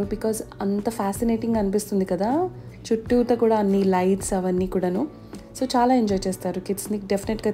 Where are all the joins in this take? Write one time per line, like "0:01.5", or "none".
none